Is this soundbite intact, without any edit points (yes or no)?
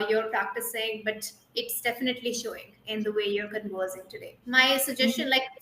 no